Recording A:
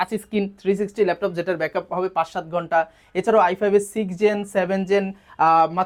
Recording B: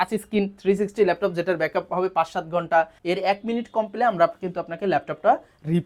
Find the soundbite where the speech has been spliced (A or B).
B